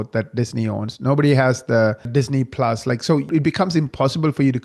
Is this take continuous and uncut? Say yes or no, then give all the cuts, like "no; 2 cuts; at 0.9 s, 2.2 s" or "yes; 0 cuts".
no; 2 cuts; at 2.1 s, 3.3 s